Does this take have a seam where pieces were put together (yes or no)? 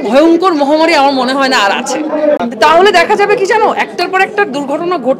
yes